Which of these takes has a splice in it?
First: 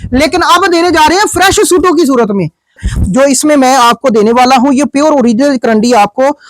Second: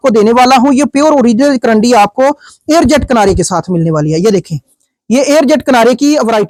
first; 1 cut; at 2.8 s

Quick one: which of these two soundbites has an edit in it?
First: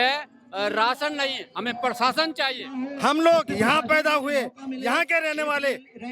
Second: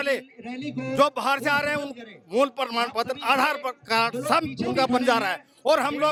first; 1 cut; at 2.9 s

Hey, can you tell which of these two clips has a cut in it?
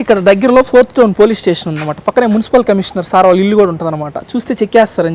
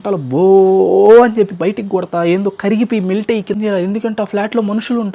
second; 1 cut; at 3.6 s

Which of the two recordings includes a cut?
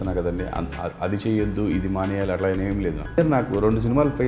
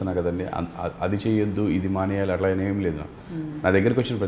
first; 1 cut; at 3.2 s

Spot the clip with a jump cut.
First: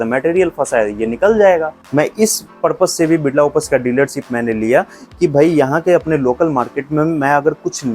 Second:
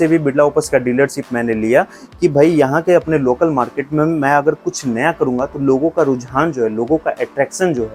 first; 1 cut; at 1.9 s

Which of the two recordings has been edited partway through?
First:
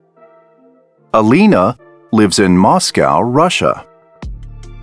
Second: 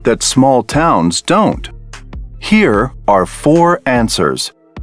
first; 1 cut; at 3.9 s

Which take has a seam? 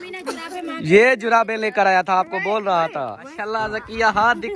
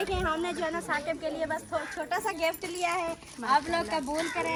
first; 1 cut; at 3.5 s

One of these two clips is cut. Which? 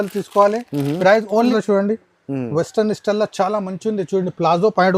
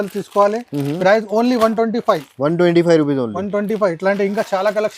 first; 1 cut; at 1.5 s

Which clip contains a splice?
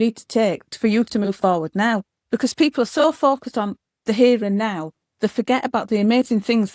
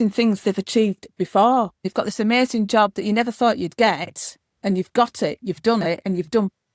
second; 1 cut; at 1.8 s

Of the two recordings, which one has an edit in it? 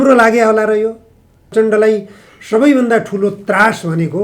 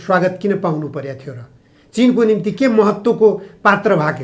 first; 1 cut; at 1.5 s

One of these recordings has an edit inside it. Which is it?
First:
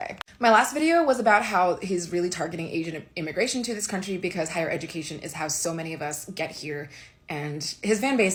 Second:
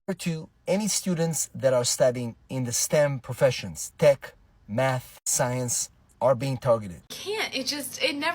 second; 1 cut; at 7.2 s

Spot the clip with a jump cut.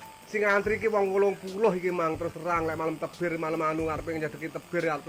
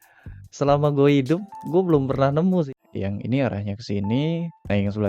second; 1 cut; at 2.7 s

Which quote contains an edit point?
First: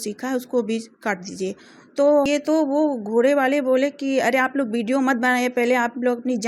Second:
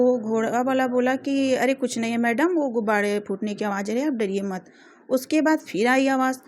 first; 1 cut; at 2.3 s

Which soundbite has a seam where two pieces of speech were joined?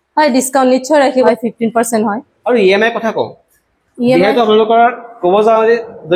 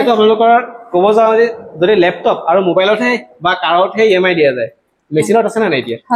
first; 2 cuts; at 1.3 s, 2.3 s

